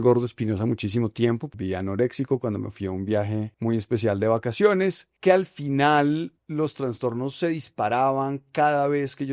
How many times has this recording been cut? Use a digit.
4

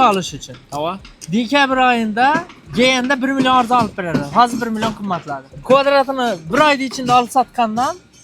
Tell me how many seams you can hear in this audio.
2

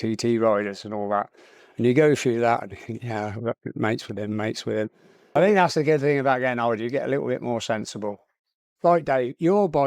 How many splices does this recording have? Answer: 2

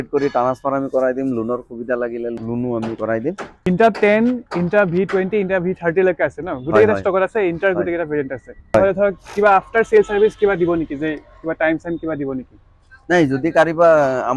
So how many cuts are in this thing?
3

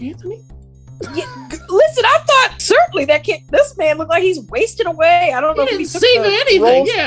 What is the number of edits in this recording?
1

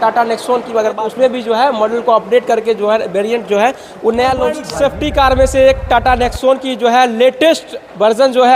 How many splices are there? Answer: 2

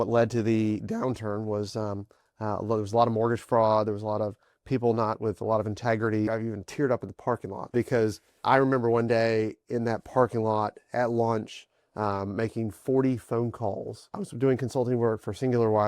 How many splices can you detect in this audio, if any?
3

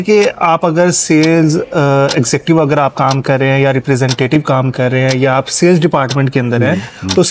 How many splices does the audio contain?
0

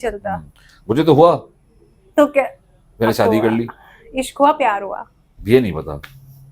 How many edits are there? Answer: 0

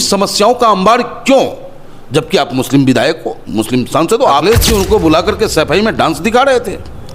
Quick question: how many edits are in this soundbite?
1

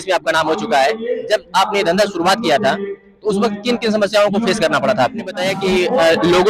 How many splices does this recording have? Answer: 1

